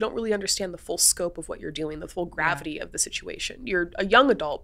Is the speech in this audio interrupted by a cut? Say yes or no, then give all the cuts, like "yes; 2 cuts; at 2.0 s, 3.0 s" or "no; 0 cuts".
no; 0 cuts